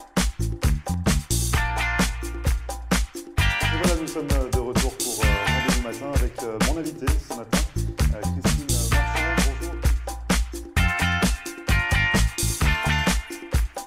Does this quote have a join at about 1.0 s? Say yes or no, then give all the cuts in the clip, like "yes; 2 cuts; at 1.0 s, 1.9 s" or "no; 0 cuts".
yes; 1 cut; at 1.0 s